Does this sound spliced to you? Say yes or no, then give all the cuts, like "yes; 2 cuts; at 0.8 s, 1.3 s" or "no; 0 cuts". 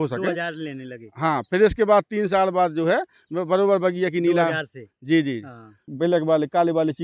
yes; 1 cut; at 5.8 s